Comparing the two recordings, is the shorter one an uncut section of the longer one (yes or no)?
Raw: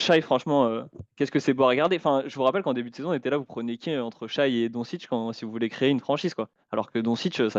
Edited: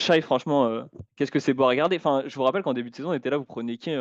yes